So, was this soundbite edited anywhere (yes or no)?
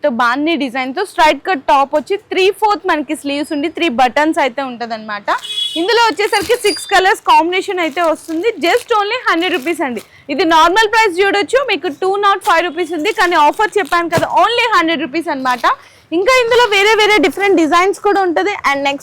no